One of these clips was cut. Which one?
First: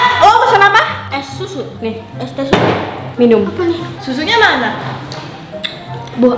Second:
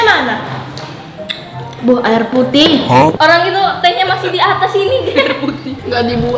second; 1 cut; at 3.1 s

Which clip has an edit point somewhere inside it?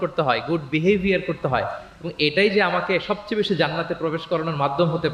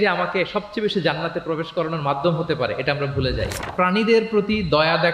second; 1 cut; at 3.7 s

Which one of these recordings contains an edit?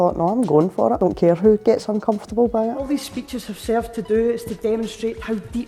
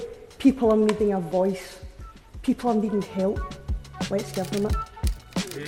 first; 2 cuts; at 1.0 s, 2.9 s

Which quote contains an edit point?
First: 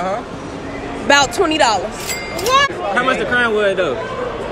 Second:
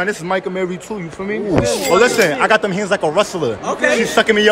first; 1 cut; at 2.7 s

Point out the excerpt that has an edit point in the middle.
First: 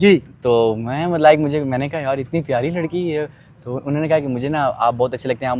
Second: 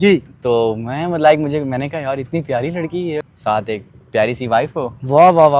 second; 1 cut; at 3.3 s

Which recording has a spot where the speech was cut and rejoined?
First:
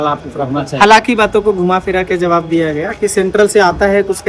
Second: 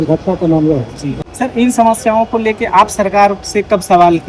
second; 1 cut; at 1.1 s

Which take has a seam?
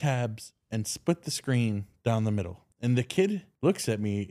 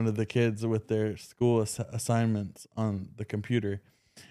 first; 2 cuts; at 2.6 s, 3.5 s

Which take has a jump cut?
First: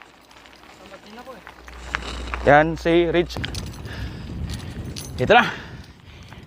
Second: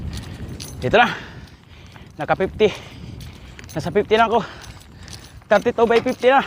first; 1 cut; at 3.3 s

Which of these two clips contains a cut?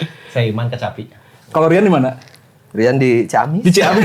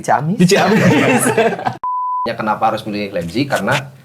second; 1 cut; at 2.2 s

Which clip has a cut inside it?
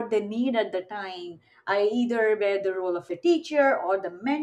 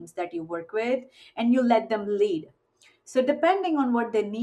first; 1 cut; at 3.1 s

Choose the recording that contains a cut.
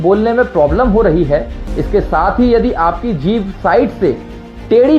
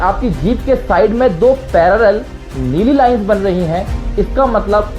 first; 1 cut; at 1.6 s

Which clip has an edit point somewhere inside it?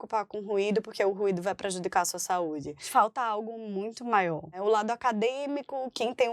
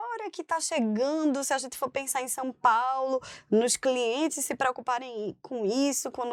first; 2 cuts; at 2.9 s, 4.6 s

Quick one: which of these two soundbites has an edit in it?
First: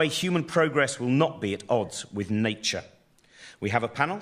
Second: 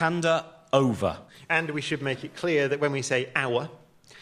second; 1 cut; at 2.8 s

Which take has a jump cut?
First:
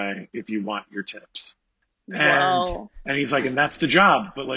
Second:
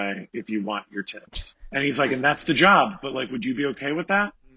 second; 1 cut; at 1.6 s

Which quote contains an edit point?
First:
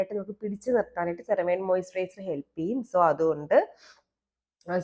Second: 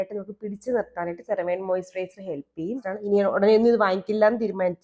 second; 1 cut; at 2.8 s

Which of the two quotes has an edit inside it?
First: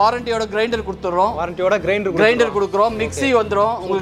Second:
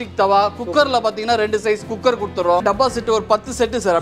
second; 1 cut; at 2.6 s

